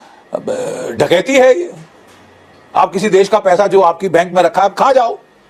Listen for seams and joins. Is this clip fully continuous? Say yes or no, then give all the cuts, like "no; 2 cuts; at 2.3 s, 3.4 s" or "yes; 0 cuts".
yes; 0 cuts